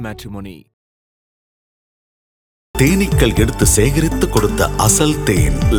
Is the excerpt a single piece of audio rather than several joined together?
yes; 0 cuts

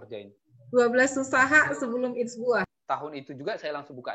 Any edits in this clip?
yes; 1 cut; at 2.8 s

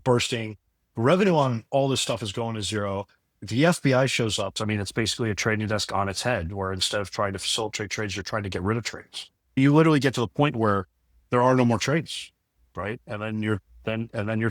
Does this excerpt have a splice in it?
yes; 2 cuts; at 4.5 s, 9.6 s

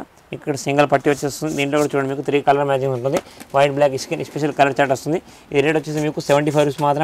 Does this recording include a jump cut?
no; 0 cuts

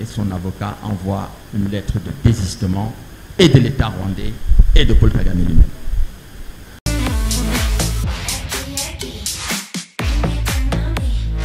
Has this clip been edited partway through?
no; 0 cuts

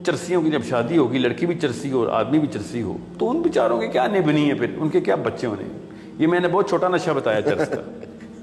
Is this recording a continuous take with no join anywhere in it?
yes; 0 cuts

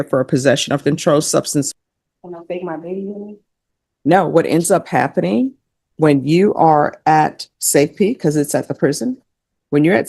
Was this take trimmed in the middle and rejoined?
yes; 1 cut; at 1.7 s

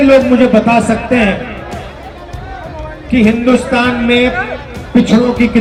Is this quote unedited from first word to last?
yes; 0 cuts

